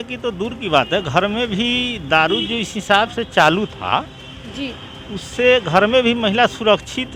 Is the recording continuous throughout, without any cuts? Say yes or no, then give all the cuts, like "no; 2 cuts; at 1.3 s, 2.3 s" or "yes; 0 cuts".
yes; 0 cuts